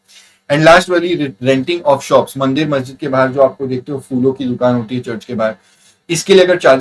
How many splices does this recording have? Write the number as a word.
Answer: one